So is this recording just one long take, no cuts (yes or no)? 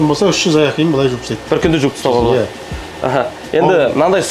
yes